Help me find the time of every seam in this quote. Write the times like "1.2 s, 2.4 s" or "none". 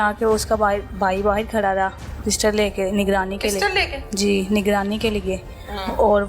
none